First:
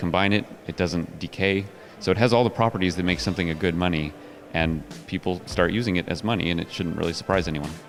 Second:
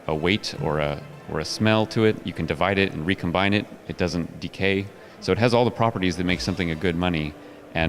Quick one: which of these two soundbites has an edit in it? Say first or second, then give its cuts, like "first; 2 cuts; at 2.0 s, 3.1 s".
second; 1 cut; at 2.3 s